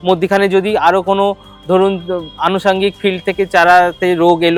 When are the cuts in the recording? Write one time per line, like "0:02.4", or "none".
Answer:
none